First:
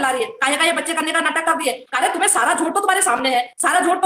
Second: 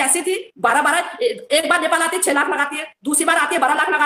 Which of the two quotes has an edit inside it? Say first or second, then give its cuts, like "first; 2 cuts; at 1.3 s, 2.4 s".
first; 1 cut; at 1.9 s